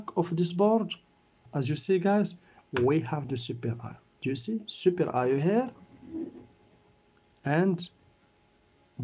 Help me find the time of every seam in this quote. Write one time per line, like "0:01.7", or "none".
0:01.4